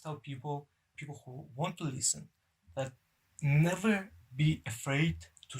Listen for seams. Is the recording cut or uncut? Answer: cut